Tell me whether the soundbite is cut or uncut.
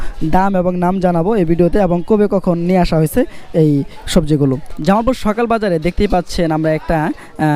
cut